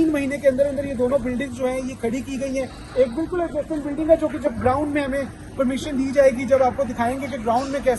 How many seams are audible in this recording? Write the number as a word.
zero